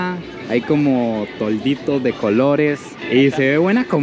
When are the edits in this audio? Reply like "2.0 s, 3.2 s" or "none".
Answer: none